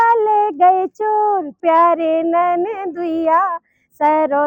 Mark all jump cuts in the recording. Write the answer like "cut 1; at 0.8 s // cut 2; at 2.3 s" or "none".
cut 1; at 1.6 s